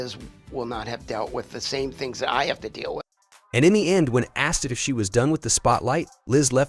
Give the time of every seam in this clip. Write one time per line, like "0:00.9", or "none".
none

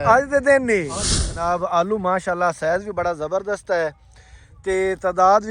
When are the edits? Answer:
0:01.3

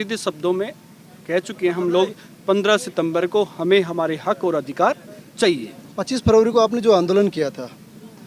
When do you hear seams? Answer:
0:05.8

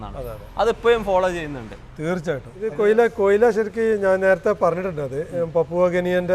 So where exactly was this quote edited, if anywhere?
0:02.5

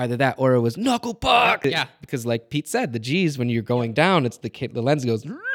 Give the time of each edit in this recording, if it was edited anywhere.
0:01.6

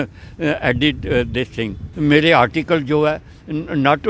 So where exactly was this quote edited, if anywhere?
0:01.8

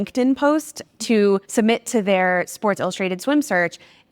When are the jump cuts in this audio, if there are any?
0:01.5

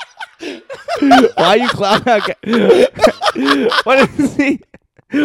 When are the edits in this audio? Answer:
none

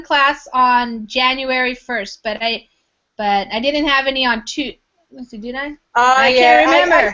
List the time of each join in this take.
0:02.1

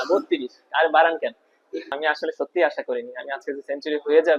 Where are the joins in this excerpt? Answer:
0:01.9

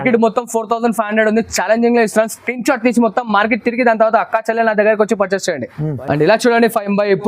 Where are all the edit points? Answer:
0:05.9

